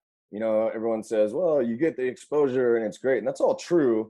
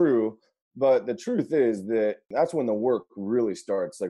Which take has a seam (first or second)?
second